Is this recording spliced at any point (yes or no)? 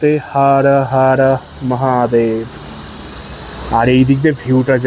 no